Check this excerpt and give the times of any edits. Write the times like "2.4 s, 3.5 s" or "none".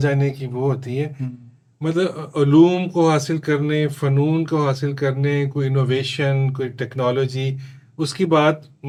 none